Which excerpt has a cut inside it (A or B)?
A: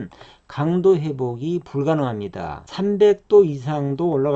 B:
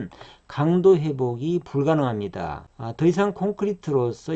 A